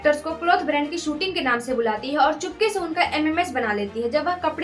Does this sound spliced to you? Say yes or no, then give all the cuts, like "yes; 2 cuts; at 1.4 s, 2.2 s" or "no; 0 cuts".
no; 0 cuts